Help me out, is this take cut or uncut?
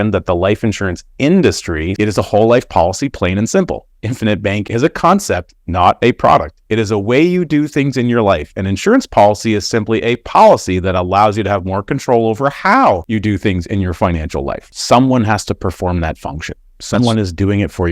cut